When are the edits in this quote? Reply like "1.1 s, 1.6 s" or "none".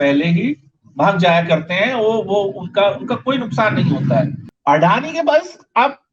4.4 s